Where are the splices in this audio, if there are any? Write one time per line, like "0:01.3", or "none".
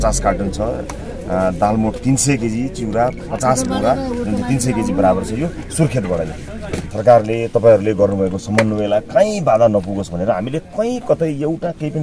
0:06.9